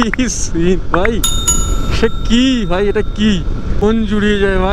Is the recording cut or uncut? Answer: cut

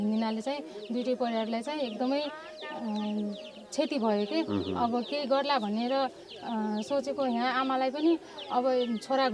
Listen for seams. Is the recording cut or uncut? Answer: uncut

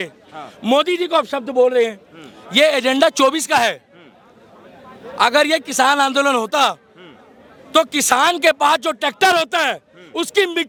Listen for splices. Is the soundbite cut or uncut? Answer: uncut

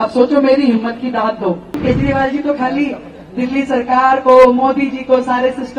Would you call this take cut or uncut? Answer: cut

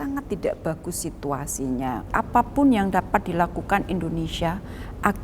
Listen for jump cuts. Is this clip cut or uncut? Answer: cut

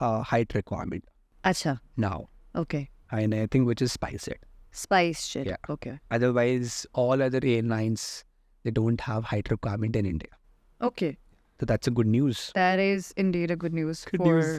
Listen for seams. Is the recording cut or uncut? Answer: uncut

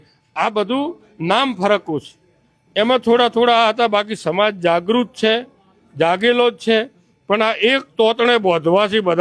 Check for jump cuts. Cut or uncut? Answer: cut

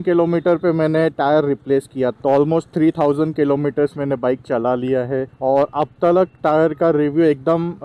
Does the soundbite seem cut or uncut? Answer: cut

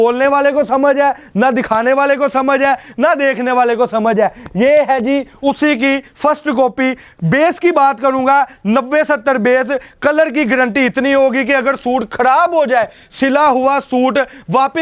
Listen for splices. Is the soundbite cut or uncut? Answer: uncut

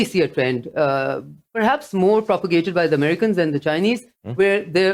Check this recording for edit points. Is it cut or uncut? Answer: uncut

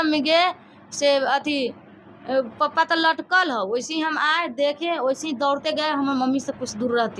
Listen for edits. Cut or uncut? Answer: uncut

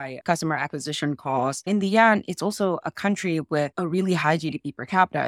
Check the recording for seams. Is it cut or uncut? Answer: cut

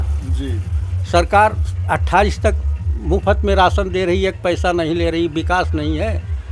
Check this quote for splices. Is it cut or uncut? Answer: uncut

